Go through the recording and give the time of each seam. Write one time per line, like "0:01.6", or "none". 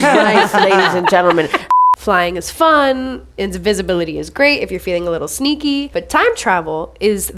0:01.7
0:05.9